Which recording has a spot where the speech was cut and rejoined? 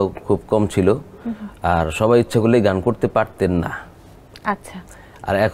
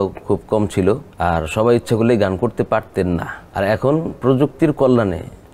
second; 2 cuts; at 1.1 s, 3.4 s

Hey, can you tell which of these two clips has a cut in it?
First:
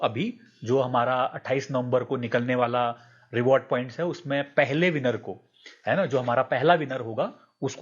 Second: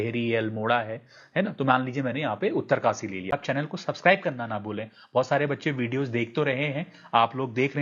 second; 1 cut; at 3.3 s

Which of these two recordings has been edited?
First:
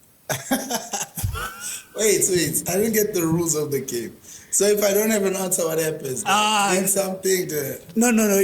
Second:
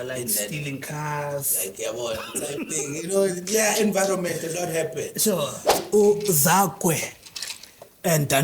second; 1 cut; at 5.8 s

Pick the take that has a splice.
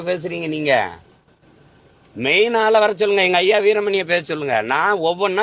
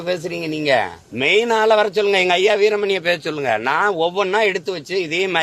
second; 1 cut; at 1.0 s

